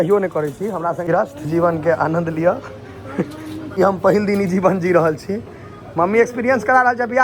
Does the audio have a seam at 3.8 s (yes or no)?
yes